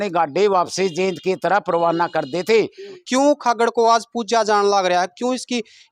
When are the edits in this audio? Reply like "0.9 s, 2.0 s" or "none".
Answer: 3.0 s

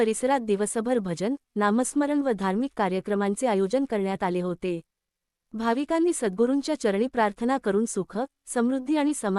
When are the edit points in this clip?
7.6 s

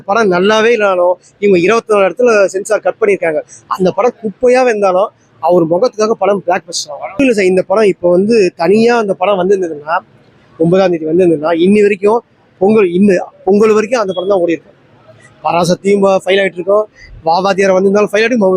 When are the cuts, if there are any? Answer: 7.2 s

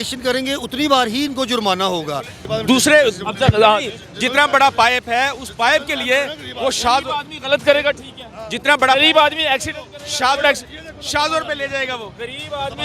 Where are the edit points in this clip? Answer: 2.4 s

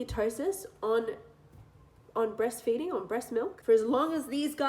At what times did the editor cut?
3.6 s

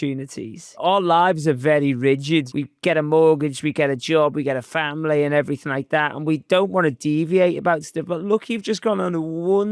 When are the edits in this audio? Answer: 0.8 s, 2.5 s

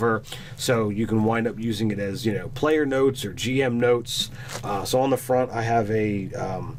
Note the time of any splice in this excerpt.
none

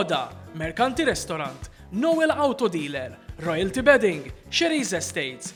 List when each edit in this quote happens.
none

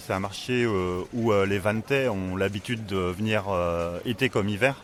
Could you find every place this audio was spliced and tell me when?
none

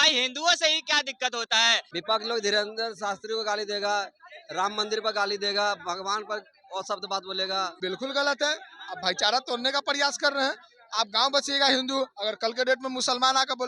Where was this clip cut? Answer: 1.9 s, 7.8 s

